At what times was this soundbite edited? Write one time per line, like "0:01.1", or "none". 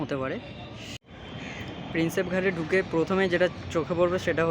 0:01.1